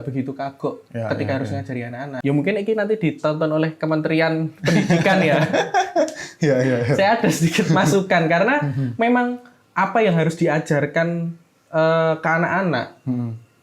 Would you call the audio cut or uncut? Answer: cut